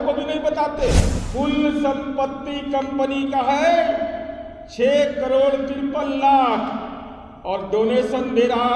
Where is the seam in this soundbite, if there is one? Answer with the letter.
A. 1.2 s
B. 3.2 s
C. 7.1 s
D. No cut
A